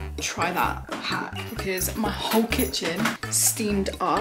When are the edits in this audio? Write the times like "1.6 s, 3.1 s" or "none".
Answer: 3.2 s